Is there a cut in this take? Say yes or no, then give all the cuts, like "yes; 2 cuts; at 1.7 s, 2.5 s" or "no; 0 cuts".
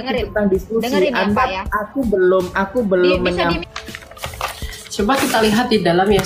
yes; 1 cut; at 3.6 s